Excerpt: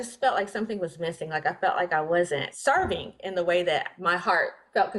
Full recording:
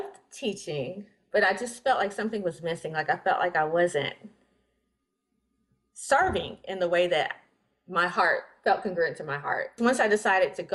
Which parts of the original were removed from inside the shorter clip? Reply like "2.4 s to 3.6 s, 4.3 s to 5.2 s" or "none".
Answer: 4.1 s to 6.0 s, 7.4 s to 7.8 s